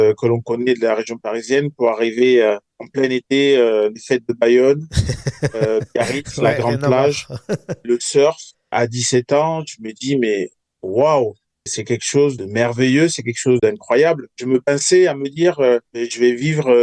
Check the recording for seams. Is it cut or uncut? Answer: uncut